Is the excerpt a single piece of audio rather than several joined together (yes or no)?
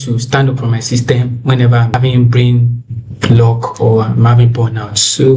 no